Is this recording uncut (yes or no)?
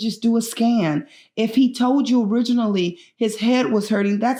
yes